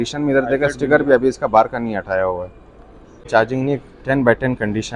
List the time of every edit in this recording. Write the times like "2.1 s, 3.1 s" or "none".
3.3 s

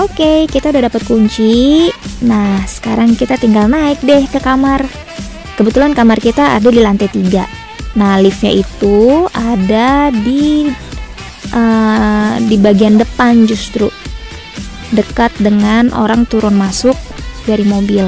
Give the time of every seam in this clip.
none

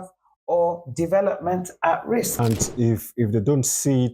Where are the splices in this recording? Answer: 2.3 s

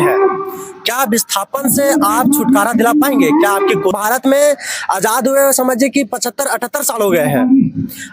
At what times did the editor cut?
4.0 s

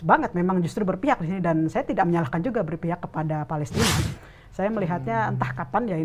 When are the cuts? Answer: 4.0 s

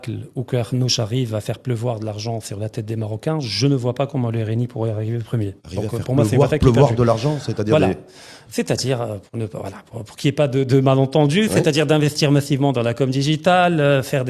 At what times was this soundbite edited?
none

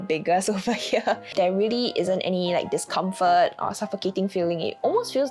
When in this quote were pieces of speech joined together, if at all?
1.2 s

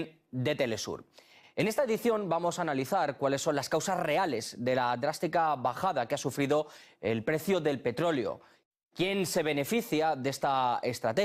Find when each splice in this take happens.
none

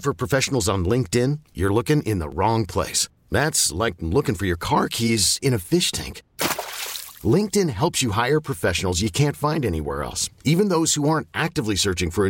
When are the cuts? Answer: none

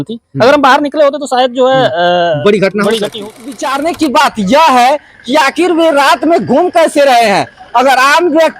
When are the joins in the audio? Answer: 3.7 s

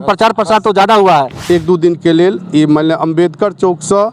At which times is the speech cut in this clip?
1.3 s

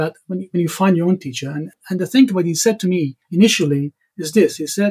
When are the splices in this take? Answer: 1.7 s, 3.2 s

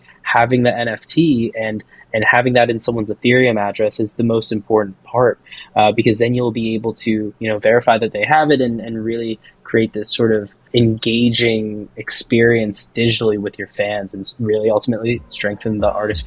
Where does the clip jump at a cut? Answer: 10.6 s

